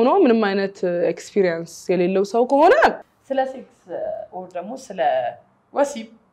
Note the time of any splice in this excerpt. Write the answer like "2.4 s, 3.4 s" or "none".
3.1 s